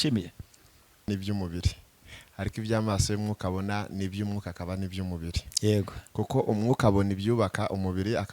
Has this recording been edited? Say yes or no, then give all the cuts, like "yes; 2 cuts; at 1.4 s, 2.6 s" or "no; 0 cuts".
yes; 1 cut; at 1.1 s